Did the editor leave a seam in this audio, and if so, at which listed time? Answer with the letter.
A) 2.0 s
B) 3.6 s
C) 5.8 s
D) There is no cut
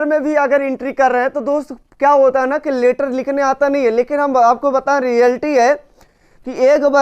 D